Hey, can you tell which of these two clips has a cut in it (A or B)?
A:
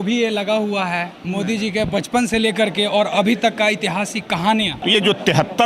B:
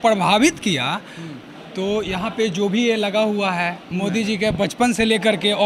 A